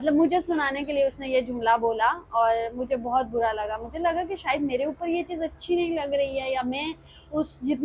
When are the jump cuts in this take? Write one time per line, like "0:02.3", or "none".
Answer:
none